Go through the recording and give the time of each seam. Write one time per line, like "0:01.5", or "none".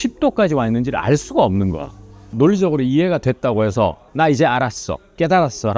0:02.2
0:04.0

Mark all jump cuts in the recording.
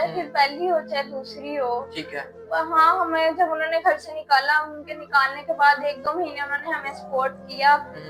none

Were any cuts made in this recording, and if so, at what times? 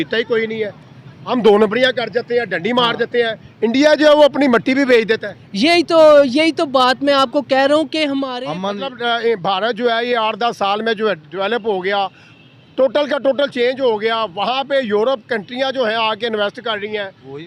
0:08.3

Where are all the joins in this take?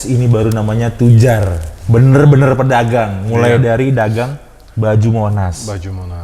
none

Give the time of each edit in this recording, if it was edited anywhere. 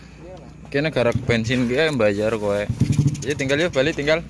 none

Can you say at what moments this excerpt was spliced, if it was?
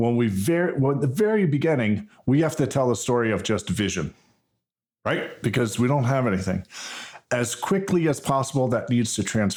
none

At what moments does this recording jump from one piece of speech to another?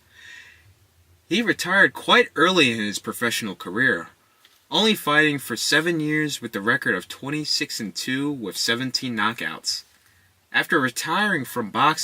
0:03.4

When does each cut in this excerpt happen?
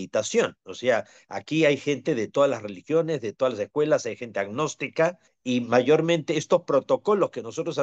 0:05.3

